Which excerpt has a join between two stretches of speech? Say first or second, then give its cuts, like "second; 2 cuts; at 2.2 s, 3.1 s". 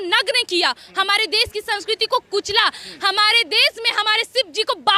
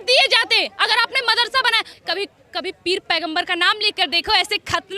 second; 1 cut; at 1.9 s